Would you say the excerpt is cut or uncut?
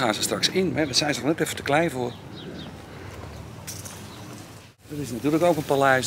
cut